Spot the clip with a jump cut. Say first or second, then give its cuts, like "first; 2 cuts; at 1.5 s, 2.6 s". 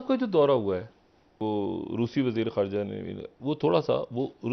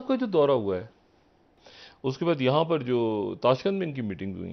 first; 1 cut; at 1.4 s